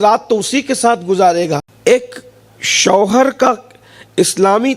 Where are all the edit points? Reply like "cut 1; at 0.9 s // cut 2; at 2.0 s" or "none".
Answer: cut 1; at 1.7 s